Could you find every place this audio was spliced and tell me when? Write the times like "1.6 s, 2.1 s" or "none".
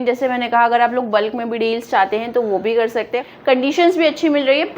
3.2 s